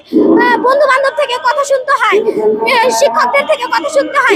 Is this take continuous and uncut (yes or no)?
yes